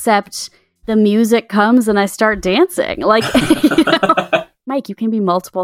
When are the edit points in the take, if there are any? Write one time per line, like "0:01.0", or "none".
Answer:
0:04.7